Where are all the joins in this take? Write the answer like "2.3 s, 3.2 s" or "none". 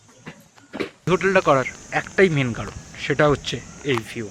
1.1 s